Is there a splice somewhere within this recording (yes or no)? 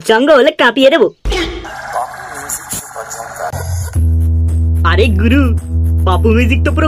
yes